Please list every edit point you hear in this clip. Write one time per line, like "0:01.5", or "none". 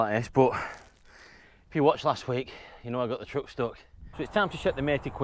0:04.1